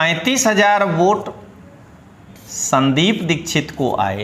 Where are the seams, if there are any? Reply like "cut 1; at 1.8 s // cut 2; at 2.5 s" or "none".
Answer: none